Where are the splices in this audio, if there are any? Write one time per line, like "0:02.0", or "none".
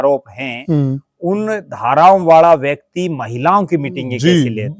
none